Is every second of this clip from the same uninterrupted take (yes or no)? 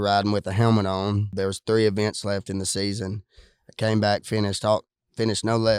no